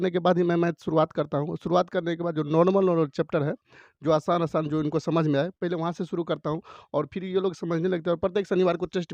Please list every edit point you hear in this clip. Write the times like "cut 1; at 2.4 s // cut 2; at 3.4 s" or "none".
none